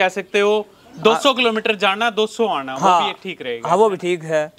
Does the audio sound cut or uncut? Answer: uncut